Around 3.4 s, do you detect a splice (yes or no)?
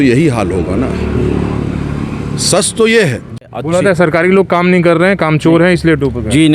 yes